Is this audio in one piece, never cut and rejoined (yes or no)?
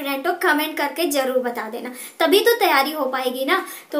yes